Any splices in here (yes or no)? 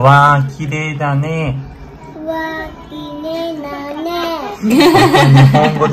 no